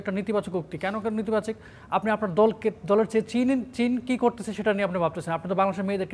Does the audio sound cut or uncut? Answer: uncut